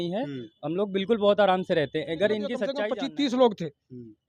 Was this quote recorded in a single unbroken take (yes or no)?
no